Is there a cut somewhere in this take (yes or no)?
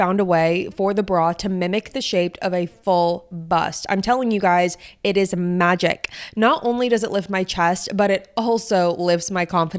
no